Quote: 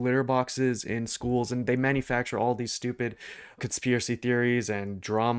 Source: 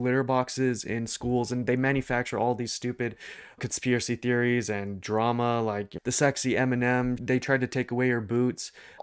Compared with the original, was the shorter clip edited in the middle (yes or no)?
no